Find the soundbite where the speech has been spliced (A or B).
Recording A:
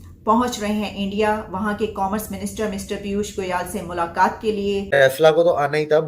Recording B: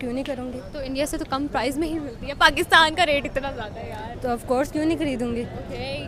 A